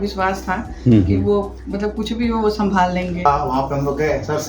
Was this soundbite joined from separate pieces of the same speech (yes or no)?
yes